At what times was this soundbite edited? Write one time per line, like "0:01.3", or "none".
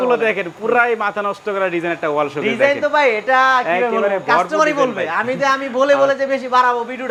none